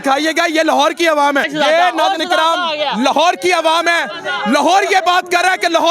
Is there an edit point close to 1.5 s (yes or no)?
yes